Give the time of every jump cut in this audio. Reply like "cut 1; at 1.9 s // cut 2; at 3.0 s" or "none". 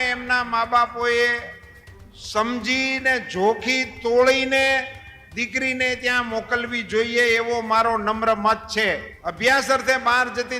cut 1; at 9.2 s